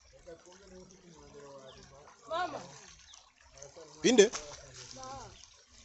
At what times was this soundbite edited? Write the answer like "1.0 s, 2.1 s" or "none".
none